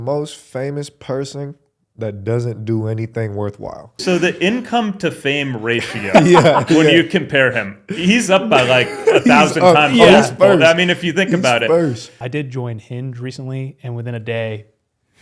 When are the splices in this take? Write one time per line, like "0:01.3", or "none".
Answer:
0:04.0
0:12.2

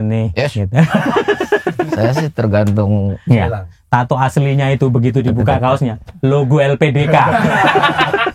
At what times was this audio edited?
0:03.2

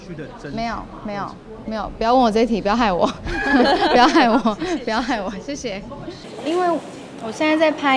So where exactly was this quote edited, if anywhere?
0:06.3

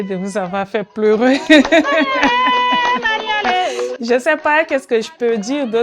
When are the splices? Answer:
none

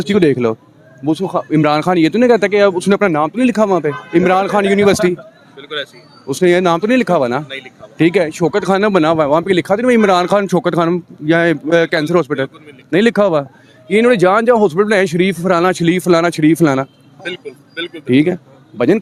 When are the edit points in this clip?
none

